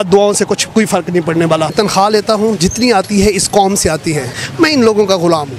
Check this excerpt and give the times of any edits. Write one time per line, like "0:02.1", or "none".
0:01.7
0:04.4